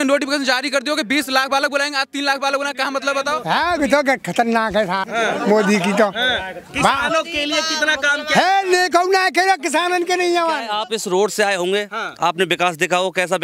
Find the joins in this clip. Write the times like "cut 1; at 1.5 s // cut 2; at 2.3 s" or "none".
cut 1; at 3.4 s // cut 2; at 5.0 s // cut 3; at 10.7 s